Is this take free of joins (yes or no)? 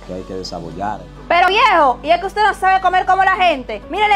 no